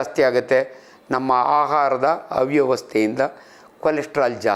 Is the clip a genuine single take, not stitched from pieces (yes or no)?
yes